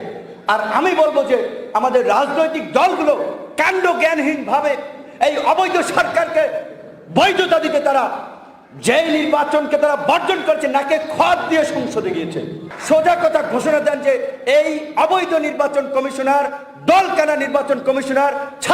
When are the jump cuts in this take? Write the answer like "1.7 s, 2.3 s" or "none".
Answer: 12.7 s